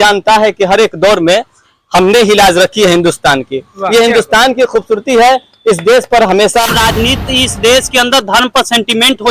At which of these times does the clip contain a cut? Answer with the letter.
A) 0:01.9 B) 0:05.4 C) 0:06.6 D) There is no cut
C